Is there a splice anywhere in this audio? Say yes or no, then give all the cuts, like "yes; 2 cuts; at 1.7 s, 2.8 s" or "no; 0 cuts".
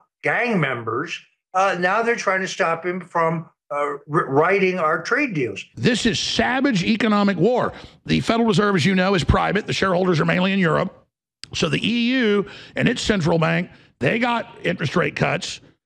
yes; 1 cut; at 5.6 s